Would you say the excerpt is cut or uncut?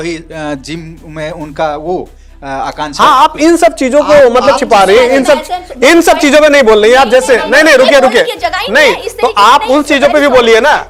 uncut